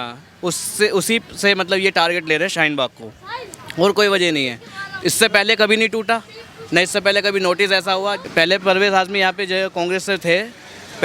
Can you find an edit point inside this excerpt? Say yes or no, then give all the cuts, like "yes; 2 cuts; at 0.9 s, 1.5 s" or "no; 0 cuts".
yes; 1 cut; at 8.2 s